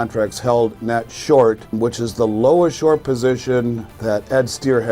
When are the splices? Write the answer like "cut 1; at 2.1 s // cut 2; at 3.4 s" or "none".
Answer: cut 1; at 1.7 s // cut 2; at 3.9 s